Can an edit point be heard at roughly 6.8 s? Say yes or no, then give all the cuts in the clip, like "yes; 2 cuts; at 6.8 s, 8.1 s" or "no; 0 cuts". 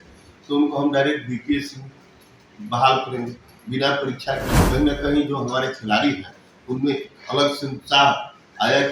no; 1 cut; at 4.5 s